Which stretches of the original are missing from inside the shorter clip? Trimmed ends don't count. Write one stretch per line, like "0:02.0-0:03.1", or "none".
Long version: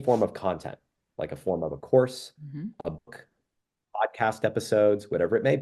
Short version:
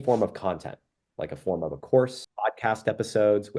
0:02.2-0:03.8